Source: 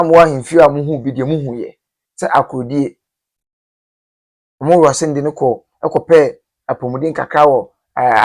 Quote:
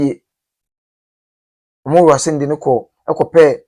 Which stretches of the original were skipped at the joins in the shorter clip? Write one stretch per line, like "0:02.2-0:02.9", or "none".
none